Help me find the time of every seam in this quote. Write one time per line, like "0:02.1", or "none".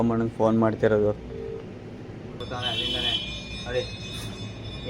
0:02.4